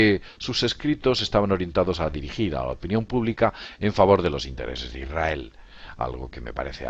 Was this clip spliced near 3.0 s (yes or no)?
no